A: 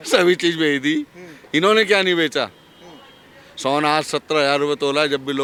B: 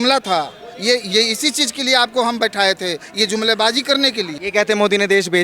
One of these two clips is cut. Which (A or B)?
B